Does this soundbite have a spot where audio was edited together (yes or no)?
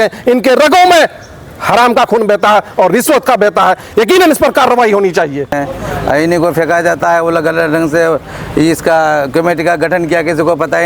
no